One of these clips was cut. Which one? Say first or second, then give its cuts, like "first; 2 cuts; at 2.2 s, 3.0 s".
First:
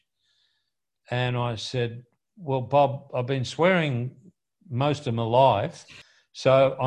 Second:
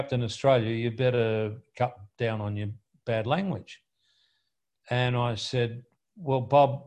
first; 1 cut; at 6.0 s